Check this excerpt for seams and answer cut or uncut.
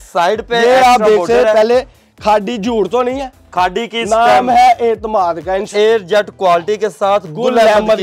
cut